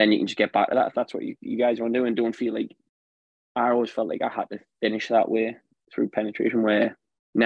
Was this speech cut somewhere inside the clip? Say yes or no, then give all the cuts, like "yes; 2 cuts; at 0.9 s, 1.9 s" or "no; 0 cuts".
no; 0 cuts